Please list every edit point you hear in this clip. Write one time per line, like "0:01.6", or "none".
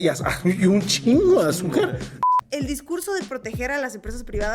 0:02.2